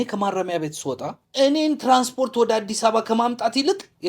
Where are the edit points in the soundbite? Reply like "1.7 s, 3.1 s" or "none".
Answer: 1.2 s